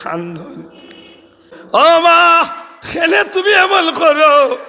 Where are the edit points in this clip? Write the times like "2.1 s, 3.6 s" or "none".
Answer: 1.8 s